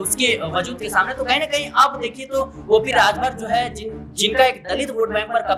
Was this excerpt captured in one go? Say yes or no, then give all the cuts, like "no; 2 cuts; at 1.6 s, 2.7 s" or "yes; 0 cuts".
yes; 0 cuts